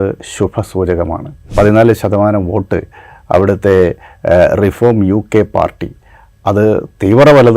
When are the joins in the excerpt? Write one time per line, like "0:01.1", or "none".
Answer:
0:01.5